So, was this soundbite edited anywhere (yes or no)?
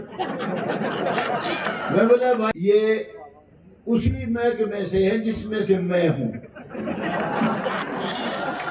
yes